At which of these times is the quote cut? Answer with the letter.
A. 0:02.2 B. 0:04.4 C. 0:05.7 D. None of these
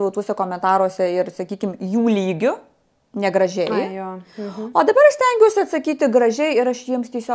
D